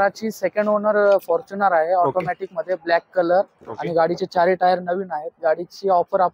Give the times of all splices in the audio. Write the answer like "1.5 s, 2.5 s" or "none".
none